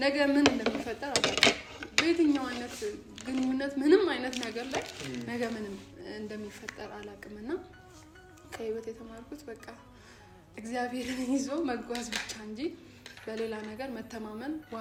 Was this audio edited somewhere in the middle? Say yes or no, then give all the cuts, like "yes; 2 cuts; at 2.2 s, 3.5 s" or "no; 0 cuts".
no; 0 cuts